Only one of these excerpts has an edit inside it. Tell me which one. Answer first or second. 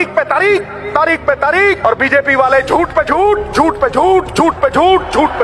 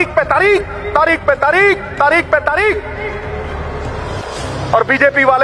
first